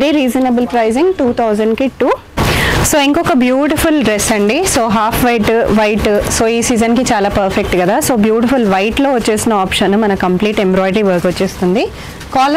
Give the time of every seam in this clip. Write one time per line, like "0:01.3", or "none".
0:02.3